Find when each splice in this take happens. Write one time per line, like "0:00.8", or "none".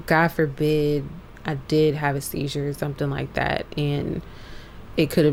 none